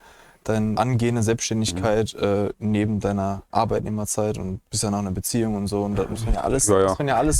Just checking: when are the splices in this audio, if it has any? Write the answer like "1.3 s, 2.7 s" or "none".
0.8 s, 3.4 s, 4.7 s